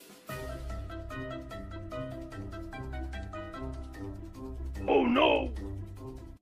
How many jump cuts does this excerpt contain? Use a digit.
1